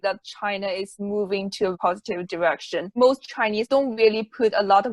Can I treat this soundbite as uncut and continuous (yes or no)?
no